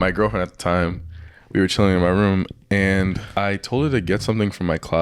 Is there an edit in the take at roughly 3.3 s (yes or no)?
yes